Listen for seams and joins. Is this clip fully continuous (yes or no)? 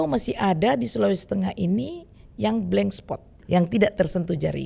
no